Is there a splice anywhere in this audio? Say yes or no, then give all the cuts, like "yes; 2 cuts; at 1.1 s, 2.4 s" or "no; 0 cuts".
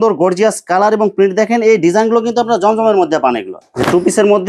yes; 1 cut; at 3.6 s